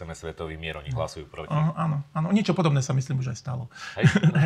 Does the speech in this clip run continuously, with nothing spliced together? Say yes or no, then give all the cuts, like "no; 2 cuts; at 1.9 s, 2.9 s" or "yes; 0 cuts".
yes; 0 cuts